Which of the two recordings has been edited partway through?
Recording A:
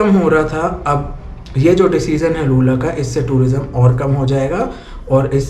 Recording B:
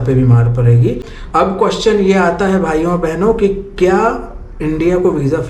B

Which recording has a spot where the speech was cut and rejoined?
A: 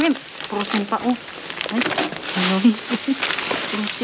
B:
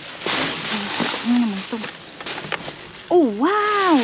B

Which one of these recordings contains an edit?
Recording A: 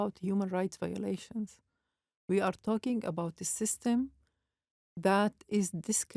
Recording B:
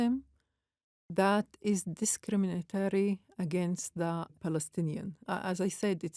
B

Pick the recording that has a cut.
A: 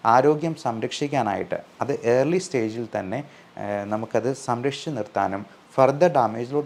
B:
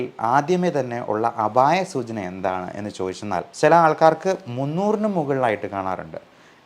B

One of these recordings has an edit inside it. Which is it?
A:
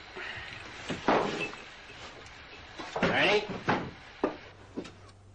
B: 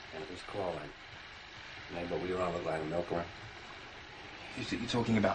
B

